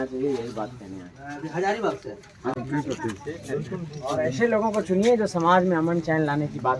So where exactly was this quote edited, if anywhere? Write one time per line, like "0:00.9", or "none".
0:02.5